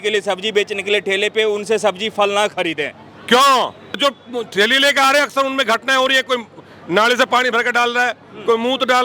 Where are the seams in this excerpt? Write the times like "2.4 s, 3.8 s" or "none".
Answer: 4.0 s